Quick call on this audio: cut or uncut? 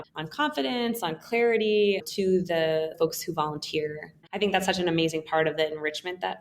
cut